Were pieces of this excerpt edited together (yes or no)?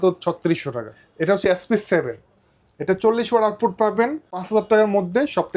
yes